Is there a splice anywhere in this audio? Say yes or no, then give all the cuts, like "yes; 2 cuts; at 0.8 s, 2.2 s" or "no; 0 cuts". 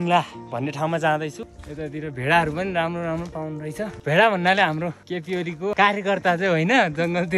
yes; 3 cuts; at 1.5 s, 4.0 s, 5.5 s